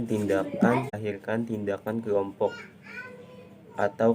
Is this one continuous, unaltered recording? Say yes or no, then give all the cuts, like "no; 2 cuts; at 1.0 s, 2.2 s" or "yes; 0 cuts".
no; 1 cut; at 0.9 s